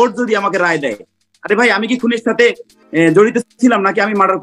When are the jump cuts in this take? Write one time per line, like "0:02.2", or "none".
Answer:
none